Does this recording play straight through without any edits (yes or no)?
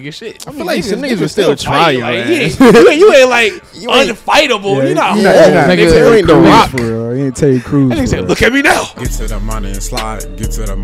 no